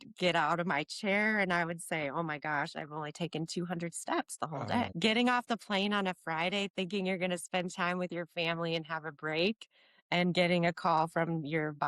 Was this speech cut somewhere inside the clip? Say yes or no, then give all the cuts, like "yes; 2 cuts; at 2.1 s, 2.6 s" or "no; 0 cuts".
yes; 1 cut; at 4.9 s